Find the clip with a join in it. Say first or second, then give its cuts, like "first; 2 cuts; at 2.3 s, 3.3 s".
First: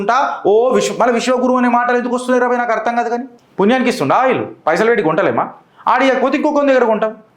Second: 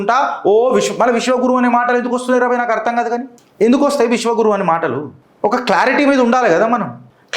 first; 1 cut; at 3.4 s